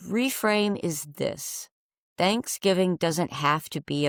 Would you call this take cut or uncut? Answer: uncut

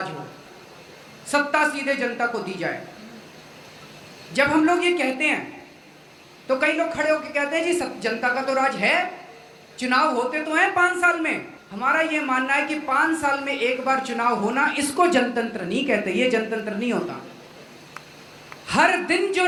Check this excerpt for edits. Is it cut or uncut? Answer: uncut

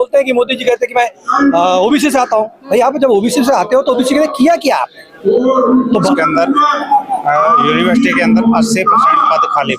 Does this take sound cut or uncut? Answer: cut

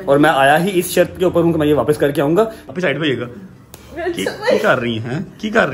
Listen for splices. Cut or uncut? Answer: cut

